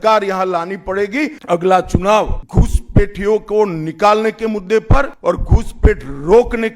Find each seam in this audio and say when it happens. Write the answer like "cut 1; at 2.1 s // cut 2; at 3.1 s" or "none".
cut 1; at 1.4 s // cut 2; at 2.4 s // cut 3; at 5.1 s